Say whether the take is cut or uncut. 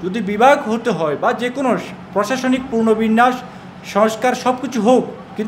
uncut